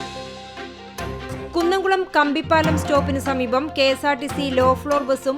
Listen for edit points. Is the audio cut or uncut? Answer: cut